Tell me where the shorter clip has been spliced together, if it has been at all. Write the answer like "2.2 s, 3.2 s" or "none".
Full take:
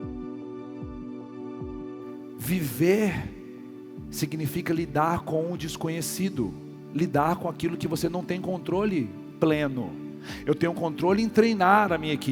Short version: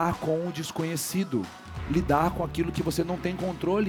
none